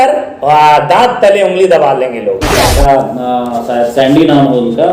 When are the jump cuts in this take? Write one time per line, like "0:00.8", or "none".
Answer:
0:02.6

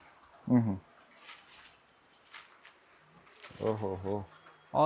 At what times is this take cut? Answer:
none

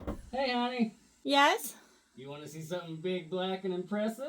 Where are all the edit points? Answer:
0:01.1

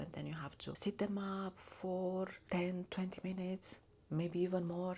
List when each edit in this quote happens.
0:00.8
0:02.4

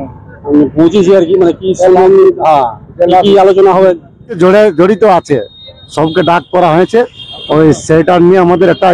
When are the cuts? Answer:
0:04.3

